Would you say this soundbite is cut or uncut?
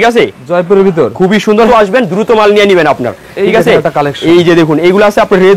cut